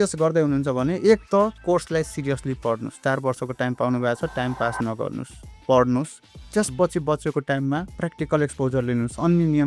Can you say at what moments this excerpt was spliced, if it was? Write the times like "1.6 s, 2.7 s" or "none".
none